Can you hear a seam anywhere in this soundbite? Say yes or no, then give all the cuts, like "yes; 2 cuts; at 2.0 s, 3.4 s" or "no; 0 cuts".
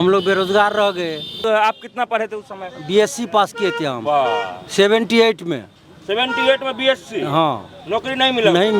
yes; 1 cut; at 1.4 s